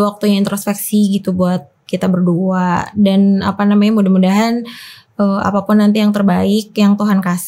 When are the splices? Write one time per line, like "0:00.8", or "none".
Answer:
none